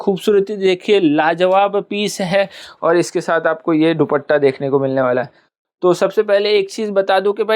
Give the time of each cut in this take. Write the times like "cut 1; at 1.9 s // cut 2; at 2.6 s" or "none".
none